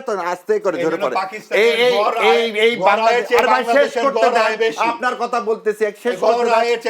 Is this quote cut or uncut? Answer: uncut